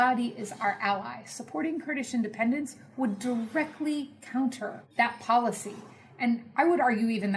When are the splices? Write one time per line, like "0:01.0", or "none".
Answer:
0:04.8